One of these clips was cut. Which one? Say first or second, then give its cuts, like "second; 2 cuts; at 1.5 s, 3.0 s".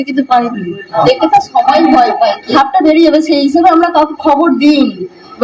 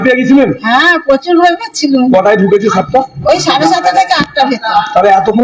first; 2 cuts; at 0.9 s, 2.5 s